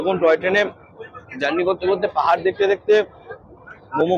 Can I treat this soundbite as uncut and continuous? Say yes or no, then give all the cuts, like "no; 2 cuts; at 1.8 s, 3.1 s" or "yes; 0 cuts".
yes; 0 cuts